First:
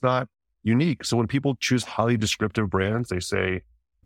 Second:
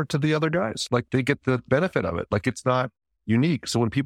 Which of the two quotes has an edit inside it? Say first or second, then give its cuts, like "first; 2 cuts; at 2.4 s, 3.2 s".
second; 1 cut; at 1.1 s